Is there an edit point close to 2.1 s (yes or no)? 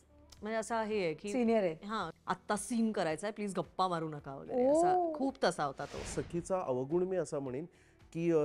yes